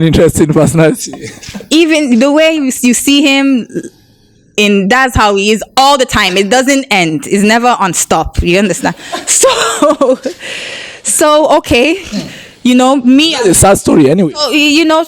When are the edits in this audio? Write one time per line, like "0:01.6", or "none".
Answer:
none